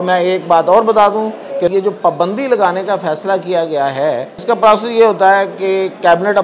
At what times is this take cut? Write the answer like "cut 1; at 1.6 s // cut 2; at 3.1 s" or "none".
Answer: cut 1; at 1.7 s // cut 2; at 4.4 s